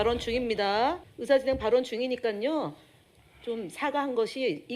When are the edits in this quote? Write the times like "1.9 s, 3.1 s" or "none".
1.1 s